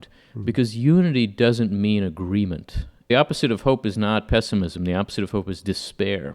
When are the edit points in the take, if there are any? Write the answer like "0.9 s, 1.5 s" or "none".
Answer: 3.1 s